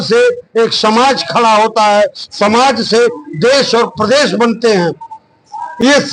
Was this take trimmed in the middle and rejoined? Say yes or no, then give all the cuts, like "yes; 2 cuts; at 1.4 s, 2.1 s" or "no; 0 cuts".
no; 0 cuts